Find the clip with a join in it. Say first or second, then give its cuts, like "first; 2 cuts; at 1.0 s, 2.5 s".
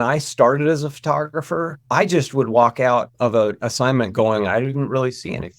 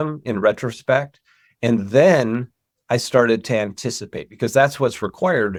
first; 1 cut; at 3.1 s